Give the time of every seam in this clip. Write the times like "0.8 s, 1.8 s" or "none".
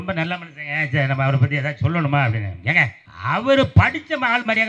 3.0 s